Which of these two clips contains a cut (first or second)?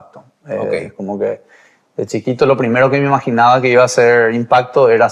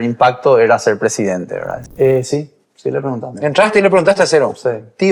second